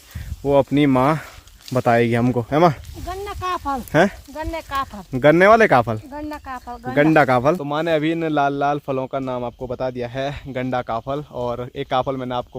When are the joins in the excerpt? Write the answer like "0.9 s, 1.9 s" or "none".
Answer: none